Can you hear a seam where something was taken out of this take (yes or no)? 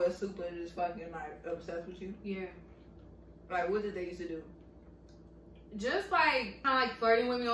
yes